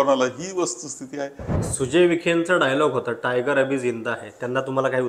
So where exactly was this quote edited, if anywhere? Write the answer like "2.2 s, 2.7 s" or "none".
1.5 s